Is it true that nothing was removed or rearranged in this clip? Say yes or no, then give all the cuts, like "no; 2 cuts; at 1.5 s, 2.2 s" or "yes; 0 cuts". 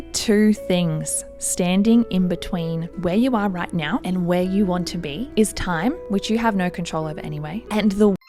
yes; 0 cuts